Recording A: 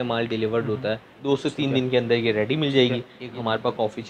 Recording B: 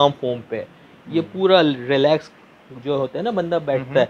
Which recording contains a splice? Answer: A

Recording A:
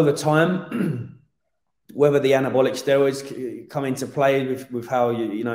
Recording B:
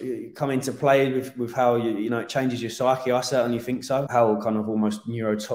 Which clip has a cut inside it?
B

